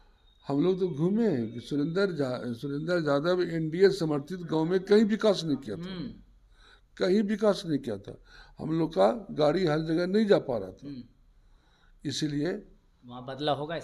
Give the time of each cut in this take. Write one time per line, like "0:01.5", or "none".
none